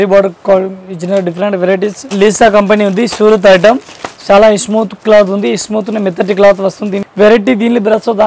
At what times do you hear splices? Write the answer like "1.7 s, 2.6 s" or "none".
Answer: 2.1 s, 7.0 s